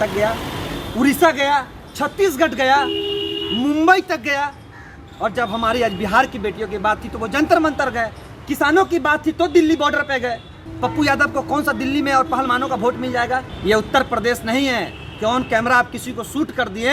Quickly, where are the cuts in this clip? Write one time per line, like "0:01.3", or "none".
0:10.6
0:13.5